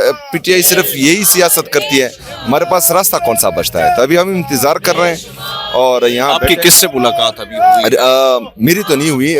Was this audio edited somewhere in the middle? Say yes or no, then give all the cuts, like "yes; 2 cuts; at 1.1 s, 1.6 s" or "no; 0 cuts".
no; 0 cuts